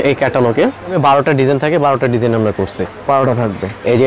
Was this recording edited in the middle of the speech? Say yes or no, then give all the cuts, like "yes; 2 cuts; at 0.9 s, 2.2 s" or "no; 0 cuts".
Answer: yes; 1 cut; at 1.0 s